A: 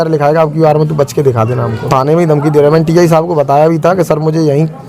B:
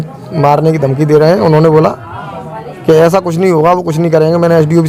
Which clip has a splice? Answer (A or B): A